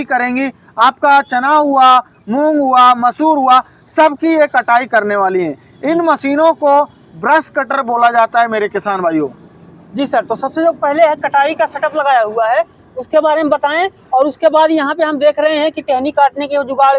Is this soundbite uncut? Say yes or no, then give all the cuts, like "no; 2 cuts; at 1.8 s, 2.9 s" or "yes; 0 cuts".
yes; 0 cuts